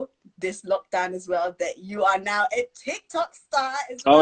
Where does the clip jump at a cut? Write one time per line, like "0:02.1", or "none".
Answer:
none